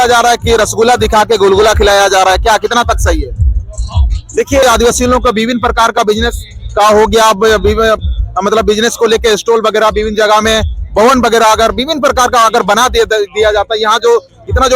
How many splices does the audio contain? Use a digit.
1